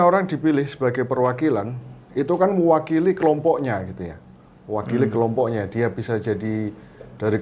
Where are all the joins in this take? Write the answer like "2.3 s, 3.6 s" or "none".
none